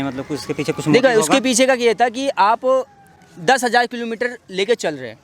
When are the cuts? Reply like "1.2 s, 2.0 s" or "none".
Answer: none